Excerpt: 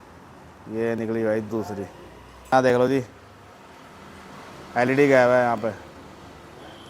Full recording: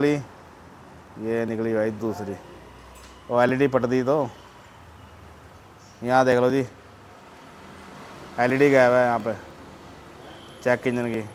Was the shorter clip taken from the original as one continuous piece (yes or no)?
no